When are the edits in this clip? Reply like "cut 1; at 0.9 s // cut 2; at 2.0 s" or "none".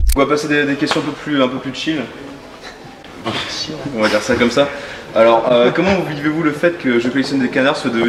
none